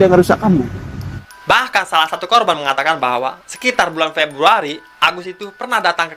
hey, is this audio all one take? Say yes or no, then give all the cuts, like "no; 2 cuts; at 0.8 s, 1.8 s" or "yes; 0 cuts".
no; 1 cut; at 1.2 s